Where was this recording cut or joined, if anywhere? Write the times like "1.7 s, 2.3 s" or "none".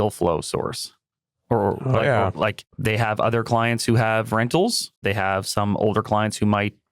2.7 s, 4.9 s